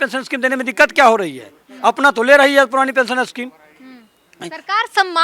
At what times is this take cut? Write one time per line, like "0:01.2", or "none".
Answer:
none